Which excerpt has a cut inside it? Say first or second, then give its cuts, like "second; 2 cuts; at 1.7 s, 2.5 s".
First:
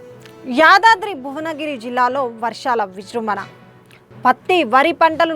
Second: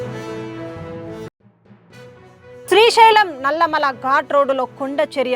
second; 1 cut; at 2.3 s